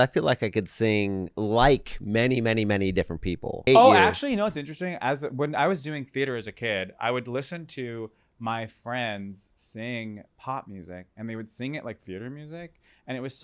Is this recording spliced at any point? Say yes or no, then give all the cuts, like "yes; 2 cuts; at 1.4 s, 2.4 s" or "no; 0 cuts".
yes; 2 cuts; at 1.3 s, 3.6 s